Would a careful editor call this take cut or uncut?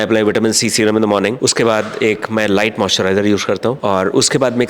cut